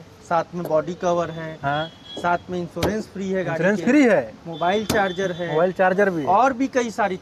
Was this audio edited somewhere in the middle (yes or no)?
no